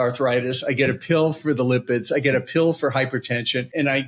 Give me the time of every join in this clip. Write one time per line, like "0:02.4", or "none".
none